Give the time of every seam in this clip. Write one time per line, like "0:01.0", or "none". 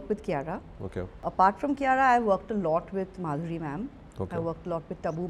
0:01.2